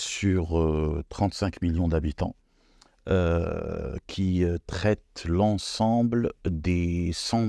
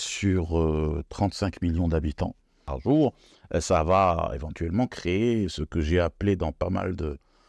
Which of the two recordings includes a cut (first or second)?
second